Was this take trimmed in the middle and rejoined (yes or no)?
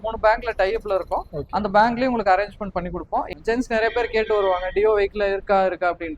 yes